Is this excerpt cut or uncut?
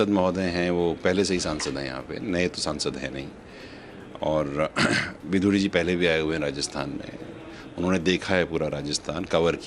uncut